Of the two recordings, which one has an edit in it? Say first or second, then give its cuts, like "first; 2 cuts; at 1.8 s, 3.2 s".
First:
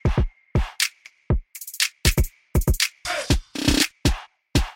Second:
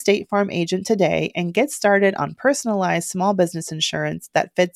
first; 1 cut; at 1.2 s